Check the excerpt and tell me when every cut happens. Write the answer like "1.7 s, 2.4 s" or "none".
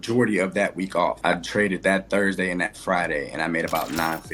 1.2 s